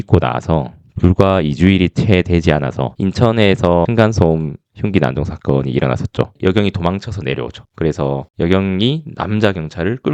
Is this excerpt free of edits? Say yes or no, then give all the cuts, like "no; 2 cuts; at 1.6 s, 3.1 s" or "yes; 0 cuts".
no; 3 cuts; at 2.9 s, 3.9 s, 6.3 s